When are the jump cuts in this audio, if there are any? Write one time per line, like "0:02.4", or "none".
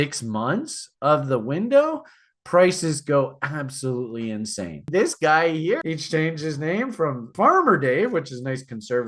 0:04.9
0:05.8
0:07.3

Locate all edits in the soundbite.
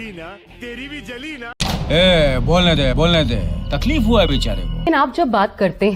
0:01.5
0:04.9

